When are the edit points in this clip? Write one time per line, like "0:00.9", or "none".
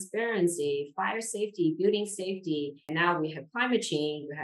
0:02.9